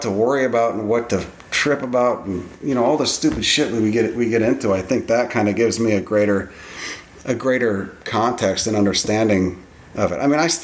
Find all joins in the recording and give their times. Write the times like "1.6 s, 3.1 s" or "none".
none